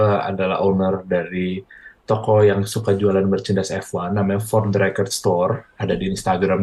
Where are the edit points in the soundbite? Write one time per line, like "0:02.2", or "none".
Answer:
none